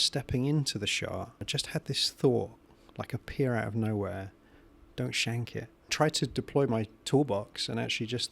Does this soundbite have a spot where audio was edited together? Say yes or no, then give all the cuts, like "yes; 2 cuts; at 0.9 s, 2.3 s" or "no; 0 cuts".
yes; 2 cuts; at 1.5 s, 5.9 s